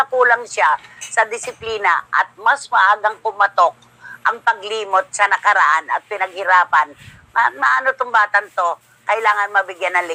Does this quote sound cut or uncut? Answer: uncut